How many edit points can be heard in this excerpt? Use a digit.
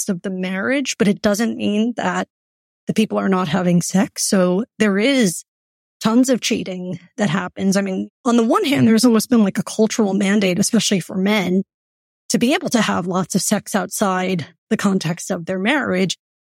1